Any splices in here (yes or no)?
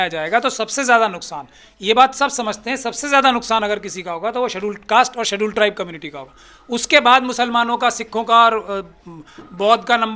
no